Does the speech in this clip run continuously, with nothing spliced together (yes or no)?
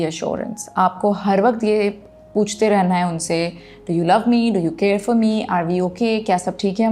yes